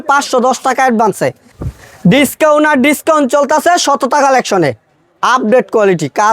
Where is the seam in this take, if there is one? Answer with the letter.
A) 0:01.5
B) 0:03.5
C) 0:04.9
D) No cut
A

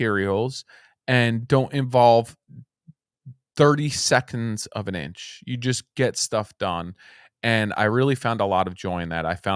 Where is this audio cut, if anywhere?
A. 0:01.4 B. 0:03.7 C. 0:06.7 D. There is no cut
A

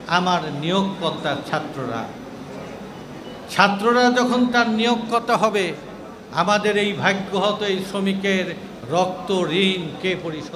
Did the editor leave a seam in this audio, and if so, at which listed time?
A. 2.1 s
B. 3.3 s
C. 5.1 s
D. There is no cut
D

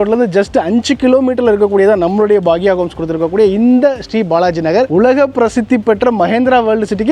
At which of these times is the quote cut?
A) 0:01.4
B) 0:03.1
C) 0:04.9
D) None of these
C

